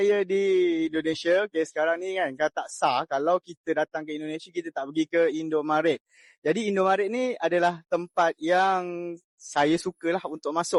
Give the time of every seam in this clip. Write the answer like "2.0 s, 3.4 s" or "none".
none